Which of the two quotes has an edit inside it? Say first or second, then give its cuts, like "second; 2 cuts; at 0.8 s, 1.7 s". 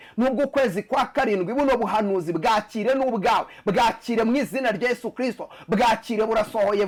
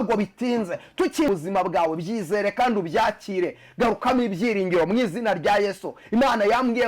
second; 1 cut; at 1.3 s